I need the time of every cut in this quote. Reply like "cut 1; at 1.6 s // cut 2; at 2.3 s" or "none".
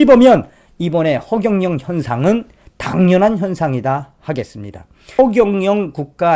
cut 1; at 5.2 s